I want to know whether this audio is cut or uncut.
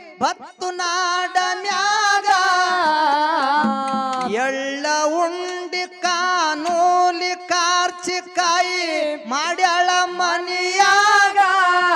cut